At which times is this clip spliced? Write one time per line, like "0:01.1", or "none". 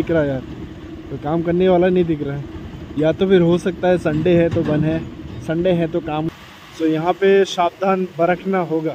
0:06.3